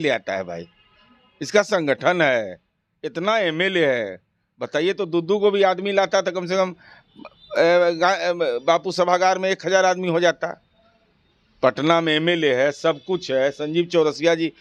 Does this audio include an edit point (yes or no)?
no